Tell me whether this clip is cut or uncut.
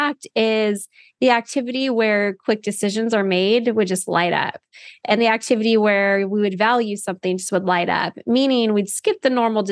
uncut